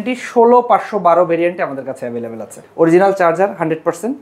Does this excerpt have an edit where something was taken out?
yes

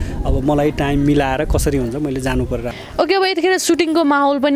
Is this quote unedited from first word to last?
yes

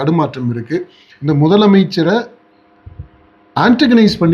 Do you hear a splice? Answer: yes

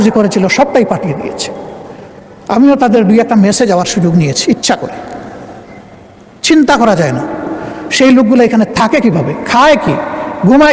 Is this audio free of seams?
yes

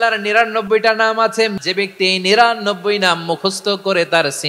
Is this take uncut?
no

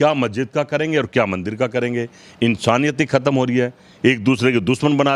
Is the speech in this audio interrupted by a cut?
no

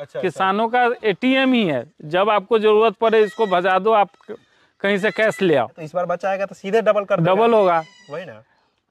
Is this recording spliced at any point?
yes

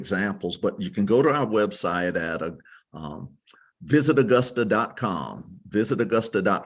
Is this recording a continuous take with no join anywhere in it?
yes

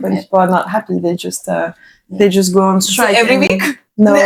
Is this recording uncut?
yes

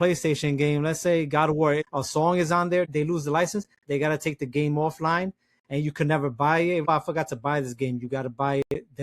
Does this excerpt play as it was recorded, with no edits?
no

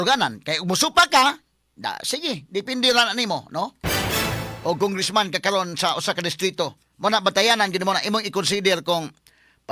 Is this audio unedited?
yes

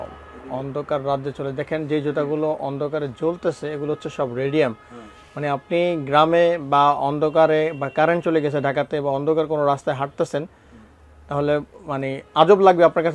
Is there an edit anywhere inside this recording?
no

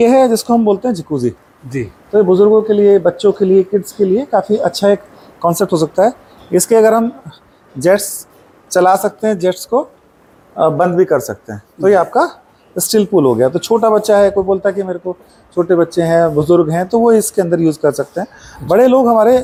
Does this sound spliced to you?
no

